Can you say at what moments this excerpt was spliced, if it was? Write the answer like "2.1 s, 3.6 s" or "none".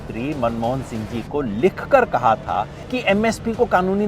2.8 s